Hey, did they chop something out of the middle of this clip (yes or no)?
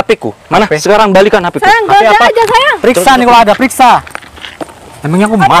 no